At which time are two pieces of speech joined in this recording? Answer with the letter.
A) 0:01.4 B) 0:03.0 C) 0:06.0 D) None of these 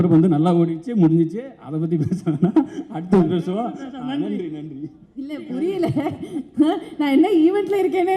D